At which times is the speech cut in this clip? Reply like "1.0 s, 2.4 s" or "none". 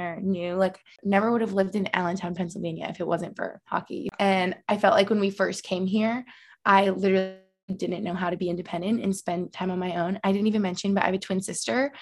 0.9 s, 4.1 s